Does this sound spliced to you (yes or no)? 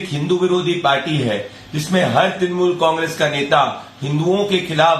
yes